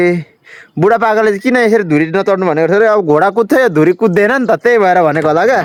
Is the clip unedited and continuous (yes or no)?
yes